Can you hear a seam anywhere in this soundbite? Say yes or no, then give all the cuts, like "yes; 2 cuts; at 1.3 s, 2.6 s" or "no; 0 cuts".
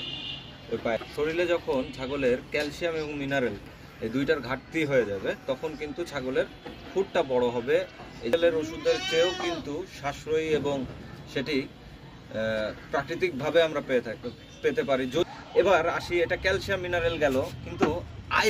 yes; 3 cuts; at 1.0 s, 8.3 s, 15.3 s